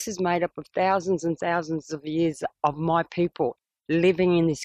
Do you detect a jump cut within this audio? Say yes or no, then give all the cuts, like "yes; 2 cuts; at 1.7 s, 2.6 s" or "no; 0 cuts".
no; 0 cuts